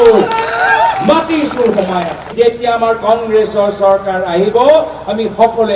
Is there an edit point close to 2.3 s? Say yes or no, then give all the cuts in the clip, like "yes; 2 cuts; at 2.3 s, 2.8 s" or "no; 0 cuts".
yes; 1 cut; at 2.3 s